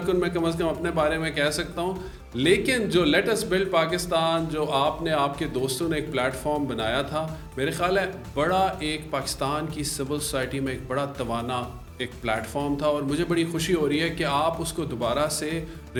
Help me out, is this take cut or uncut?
uncut